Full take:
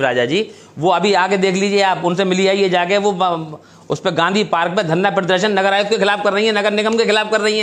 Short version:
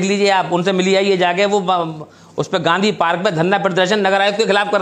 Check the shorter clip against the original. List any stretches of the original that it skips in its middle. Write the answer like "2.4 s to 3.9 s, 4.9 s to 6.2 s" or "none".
none